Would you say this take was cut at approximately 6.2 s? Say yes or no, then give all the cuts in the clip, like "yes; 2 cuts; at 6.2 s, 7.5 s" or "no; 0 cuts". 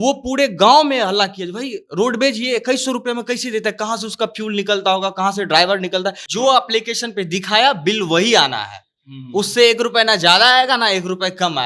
yes; 1 cut; at 6.2 s